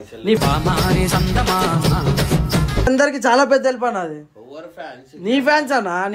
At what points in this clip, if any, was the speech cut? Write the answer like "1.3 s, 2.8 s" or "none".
2.8 s